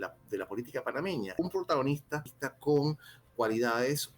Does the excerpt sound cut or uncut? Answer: cut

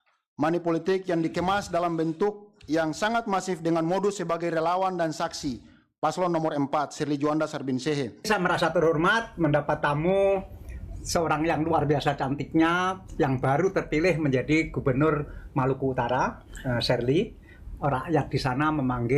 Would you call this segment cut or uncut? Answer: cut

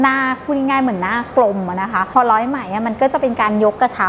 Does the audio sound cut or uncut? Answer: cut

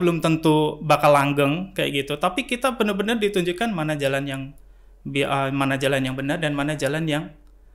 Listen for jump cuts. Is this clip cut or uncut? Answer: uncut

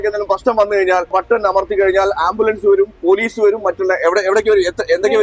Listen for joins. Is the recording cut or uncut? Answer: uncut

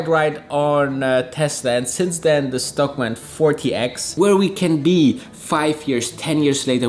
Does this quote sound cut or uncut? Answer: cut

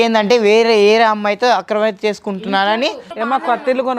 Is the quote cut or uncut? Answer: cut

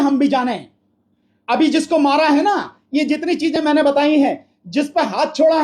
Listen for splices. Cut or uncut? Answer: uncut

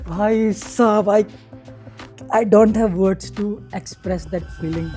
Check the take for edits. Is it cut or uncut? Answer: uncut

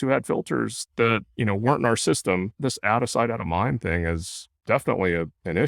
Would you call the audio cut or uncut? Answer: cut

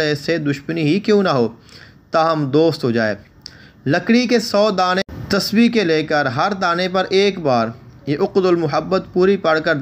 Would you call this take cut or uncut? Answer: cut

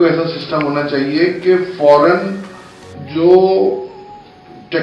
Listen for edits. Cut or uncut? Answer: uncut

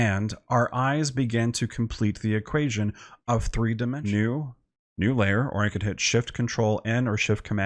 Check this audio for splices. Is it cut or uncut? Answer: cut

